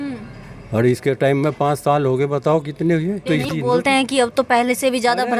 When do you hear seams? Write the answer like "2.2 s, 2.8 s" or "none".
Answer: 3.2 s